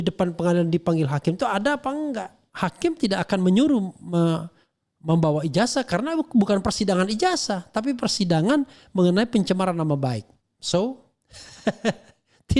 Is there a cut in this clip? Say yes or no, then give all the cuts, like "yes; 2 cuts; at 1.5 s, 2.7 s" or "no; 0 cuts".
yes; 1 cut; at 2.4 s